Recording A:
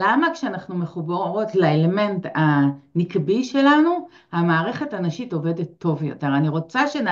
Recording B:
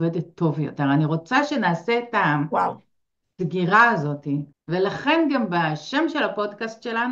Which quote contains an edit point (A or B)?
B